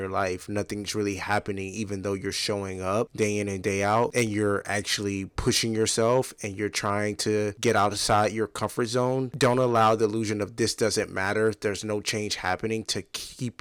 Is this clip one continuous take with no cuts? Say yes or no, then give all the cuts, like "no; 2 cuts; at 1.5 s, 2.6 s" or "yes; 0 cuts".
yes; 0 cuts